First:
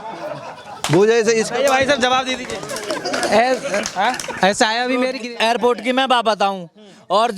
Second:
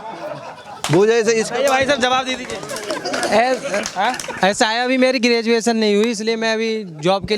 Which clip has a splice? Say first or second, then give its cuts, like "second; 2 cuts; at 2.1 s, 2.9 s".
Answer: first; 1 cut; at 5.2 s